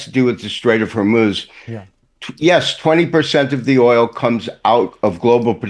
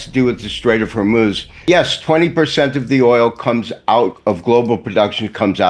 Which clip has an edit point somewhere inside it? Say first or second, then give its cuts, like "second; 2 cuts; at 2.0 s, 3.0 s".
second; 1 cut; at 1.5 s